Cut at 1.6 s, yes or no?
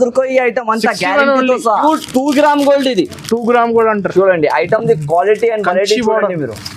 yes